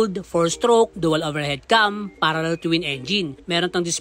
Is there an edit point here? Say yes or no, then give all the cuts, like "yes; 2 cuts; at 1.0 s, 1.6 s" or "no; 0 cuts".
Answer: no; 0 cuts